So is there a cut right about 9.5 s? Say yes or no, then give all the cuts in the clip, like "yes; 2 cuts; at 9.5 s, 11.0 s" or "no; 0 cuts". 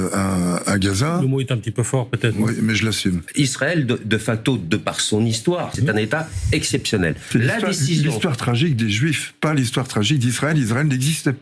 no; 3 cuts; at 3.3 s, 5.8 s, 7.2 s